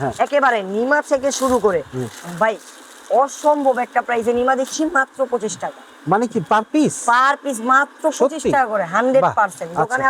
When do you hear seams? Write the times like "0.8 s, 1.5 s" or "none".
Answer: none